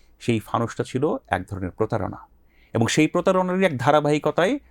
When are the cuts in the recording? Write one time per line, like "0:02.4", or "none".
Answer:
none